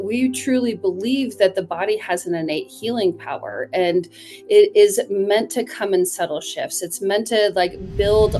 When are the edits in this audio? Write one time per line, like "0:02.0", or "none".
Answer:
none